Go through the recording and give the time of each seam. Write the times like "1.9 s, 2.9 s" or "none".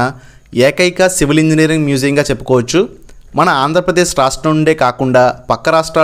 none